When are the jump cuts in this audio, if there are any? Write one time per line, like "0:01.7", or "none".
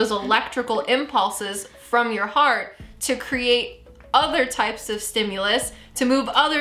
none

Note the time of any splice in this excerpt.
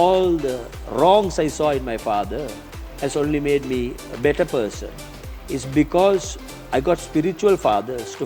none

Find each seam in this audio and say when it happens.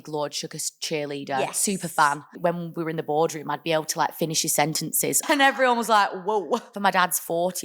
0:02.3
0:05.2
0:06.7

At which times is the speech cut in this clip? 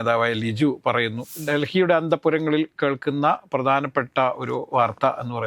0:01.4

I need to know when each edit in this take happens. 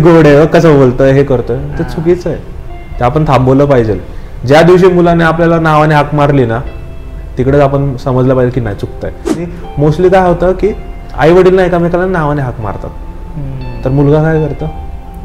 0:09.4

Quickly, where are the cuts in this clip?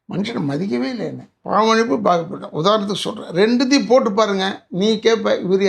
0:01.3

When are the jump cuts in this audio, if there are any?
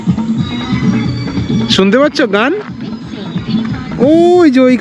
none

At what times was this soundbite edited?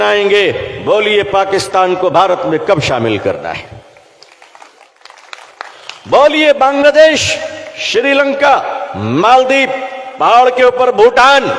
0:05.0

